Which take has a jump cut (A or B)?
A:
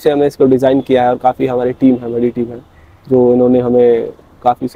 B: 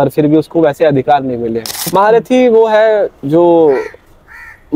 B